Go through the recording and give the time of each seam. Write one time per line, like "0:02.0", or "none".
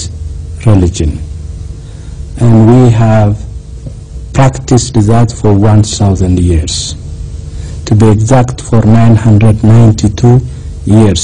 0:05.4